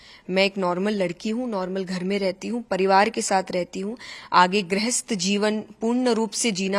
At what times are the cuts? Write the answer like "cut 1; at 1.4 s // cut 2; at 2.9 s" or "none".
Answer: none